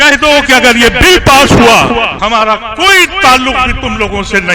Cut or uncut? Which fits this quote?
cut